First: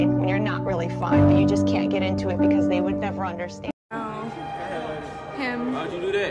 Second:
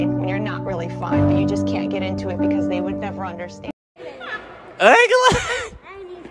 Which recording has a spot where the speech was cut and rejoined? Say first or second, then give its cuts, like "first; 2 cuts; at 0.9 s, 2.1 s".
first; 1 cut; at 3.9 s